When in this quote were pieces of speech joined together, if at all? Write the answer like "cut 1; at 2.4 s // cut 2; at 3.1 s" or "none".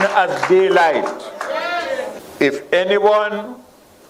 cut 1; at 2.2 s